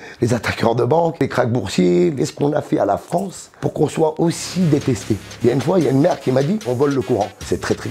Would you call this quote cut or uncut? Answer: cut